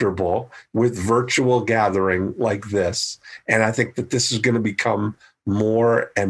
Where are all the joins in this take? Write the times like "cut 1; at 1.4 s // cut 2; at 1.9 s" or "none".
none